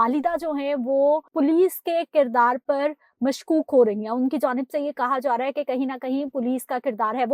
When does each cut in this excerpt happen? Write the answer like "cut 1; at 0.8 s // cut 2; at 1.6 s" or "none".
cut 1; at 1.3 s